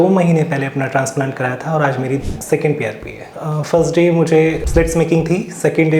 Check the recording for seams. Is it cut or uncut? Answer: cut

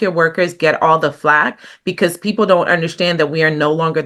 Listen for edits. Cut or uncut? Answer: uncut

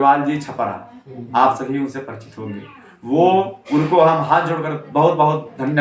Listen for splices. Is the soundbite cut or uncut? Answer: uncut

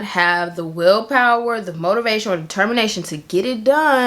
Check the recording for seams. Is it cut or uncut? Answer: uncut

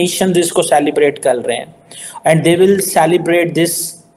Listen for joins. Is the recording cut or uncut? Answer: uncut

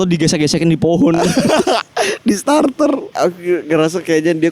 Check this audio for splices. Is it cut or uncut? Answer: cut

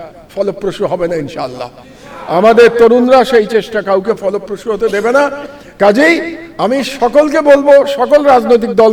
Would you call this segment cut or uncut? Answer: uncut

